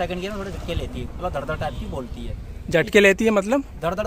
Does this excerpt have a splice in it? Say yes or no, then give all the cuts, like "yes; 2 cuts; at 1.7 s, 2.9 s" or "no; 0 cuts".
no; 0 cuts